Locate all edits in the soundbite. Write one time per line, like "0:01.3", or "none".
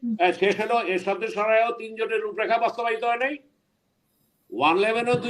none